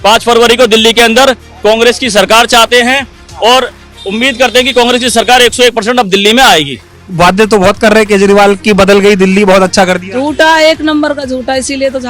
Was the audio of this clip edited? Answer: yes; 1 cut; at 6.9 s

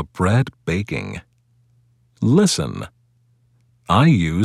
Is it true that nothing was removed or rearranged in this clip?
no; 2 cuts; at 1.4 s, 3.1 s

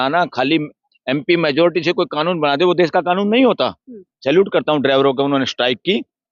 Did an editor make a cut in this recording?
yes; 1 cut; at 4.1 s

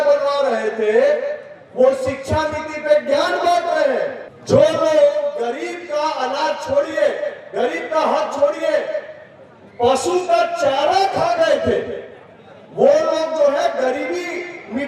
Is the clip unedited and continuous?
no; 1 cut; at 4.3 s

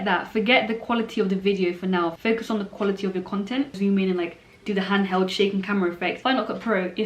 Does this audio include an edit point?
yes; 2 cuts; at 3.8 s, 6.2 s

